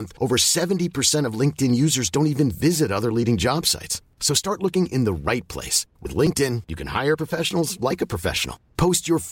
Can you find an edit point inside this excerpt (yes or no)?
no